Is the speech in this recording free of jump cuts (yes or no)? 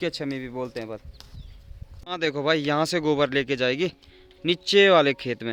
yes